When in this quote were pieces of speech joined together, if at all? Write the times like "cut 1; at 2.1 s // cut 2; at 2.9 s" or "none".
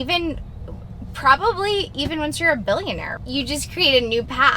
cut 1; at 3.1 s